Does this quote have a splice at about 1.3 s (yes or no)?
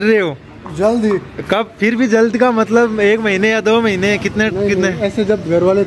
no